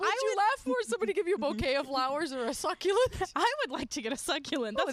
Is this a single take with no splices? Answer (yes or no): yes